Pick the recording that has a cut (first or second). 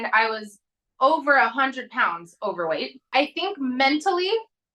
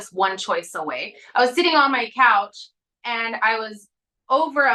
first